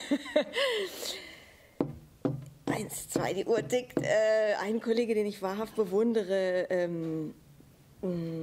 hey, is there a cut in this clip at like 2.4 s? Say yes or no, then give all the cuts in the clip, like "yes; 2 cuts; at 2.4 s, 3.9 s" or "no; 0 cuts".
no; 1 cut; at 5.0 s